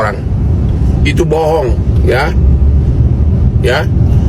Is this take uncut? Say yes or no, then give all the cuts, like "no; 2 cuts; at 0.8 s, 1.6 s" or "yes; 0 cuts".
yes; 0 cuts